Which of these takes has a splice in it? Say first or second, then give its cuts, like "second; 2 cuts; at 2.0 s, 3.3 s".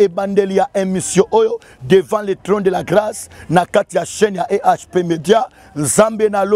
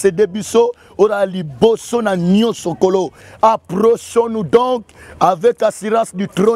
second; 1 cut; at 3.2 s